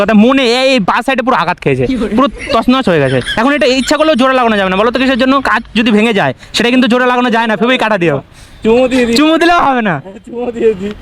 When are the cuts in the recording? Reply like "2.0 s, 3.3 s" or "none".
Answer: none